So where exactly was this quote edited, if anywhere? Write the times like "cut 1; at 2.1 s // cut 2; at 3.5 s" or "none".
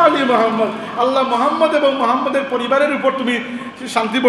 none